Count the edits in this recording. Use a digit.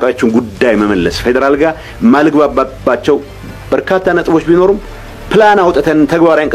0